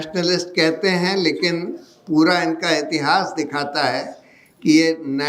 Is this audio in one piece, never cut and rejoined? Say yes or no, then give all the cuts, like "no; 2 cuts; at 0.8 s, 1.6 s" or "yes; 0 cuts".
yes; 0 cuts